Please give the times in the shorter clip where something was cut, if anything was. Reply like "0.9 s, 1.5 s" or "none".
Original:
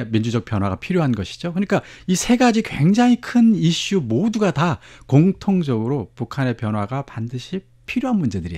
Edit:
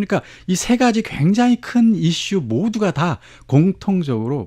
none